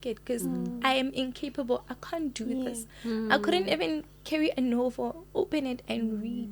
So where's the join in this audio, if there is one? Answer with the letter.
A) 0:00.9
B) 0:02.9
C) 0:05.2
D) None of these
D